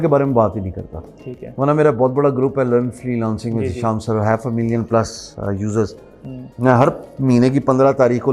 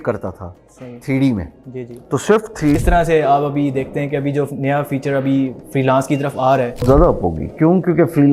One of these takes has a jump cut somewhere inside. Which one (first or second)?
second